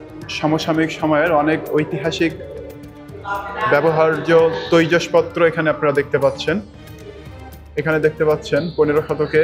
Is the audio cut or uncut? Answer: uncut